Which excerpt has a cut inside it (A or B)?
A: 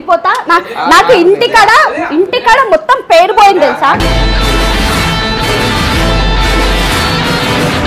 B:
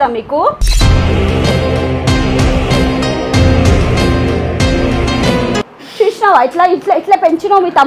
B